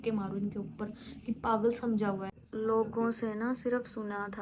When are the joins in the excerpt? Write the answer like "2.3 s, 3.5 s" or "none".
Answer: 2.3 s